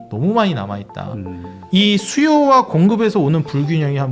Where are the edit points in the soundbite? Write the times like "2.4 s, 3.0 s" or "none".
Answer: 1.5 s

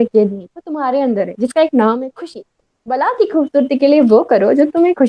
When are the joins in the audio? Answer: none

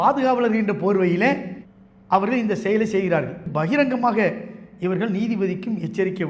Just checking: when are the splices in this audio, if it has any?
3.5 s

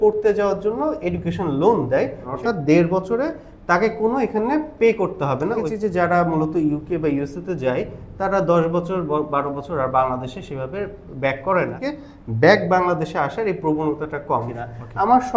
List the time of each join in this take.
2.3 s, 5.6 s, 11.8 s, 14.5 s

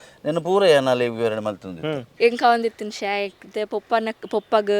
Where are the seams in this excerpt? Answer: 2.0 s

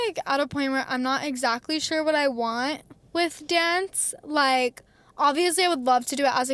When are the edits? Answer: none

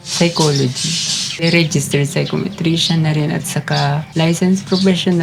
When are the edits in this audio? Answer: 1.4 s, 4.1 s

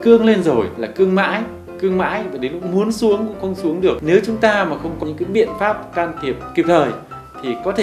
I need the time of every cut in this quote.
4.0 s, 5.0 s

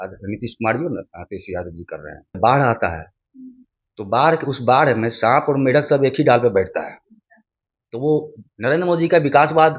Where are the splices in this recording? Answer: 2.4 s

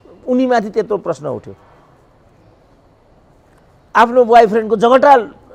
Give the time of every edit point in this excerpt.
none

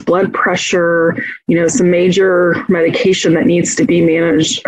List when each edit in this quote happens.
none

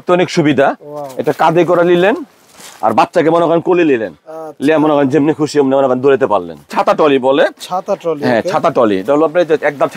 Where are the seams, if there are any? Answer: 6.7 s

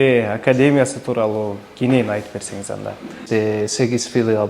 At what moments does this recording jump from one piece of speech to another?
3.2 s

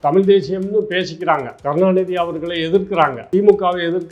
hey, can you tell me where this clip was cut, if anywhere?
1.5 s, 3.2 s

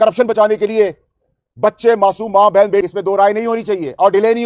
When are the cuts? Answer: 2.9 s

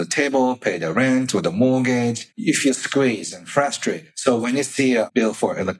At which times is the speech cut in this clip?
2.3 s, 4.1 s, 5.1 s

